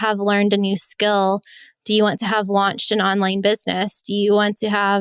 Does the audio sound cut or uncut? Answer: uncut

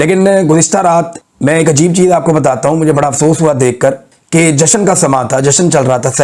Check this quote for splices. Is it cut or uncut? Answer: cut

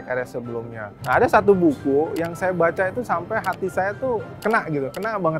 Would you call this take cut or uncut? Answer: cut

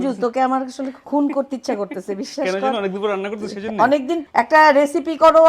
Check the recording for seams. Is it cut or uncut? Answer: cut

